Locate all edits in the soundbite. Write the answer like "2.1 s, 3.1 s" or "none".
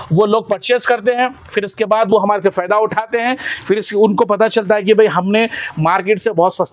none